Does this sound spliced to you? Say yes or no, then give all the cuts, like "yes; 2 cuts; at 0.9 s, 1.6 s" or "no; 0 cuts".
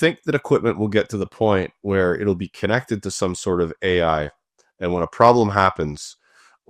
no; 0 cuts